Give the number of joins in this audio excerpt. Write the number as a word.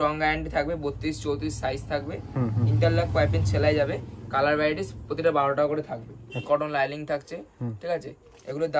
one